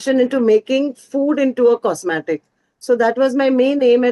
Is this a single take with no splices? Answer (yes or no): yes